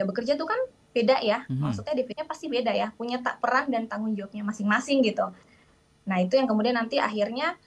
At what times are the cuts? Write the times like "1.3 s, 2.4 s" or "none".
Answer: 2.2 s